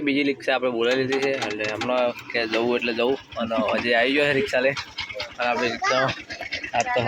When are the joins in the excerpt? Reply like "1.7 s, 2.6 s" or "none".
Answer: none